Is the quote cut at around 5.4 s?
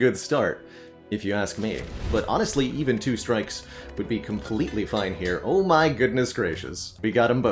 no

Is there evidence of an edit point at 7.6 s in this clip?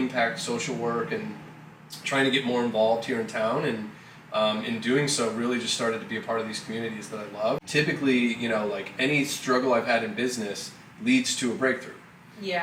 yes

